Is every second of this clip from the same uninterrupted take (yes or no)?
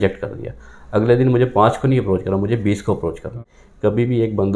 no